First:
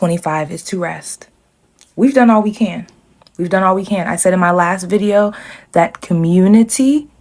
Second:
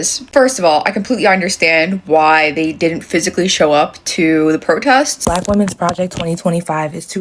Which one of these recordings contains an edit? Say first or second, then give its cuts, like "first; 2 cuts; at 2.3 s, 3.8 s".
second; 1 cut; at 5.2 s